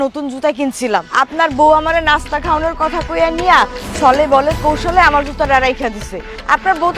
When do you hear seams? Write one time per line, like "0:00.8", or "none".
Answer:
0:01.1